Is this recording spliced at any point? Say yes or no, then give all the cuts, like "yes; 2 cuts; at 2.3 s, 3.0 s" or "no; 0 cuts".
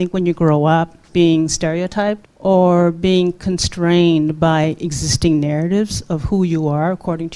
yes; 2 cuts; at 1.1 s, 2.3 s